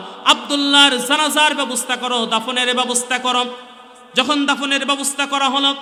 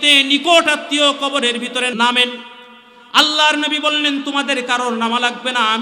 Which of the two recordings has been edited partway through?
second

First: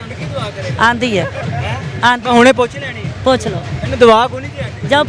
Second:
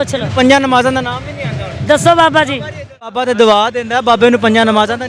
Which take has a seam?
second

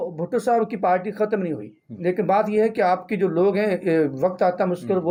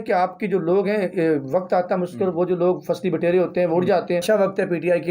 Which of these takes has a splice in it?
second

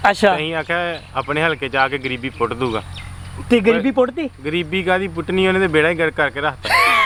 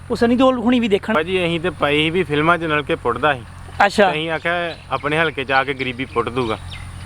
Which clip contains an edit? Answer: second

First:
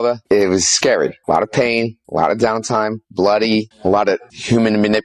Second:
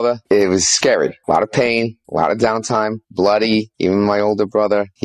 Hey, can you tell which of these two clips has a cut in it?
first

